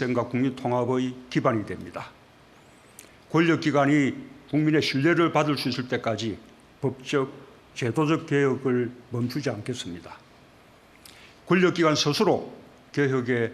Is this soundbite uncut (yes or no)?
yes